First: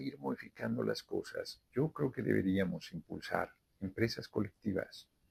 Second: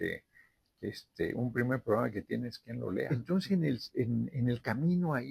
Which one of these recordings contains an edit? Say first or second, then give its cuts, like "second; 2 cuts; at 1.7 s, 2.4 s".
second; 1 cut; at 3.1 s